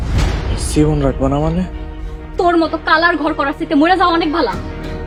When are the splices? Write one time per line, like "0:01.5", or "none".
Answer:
none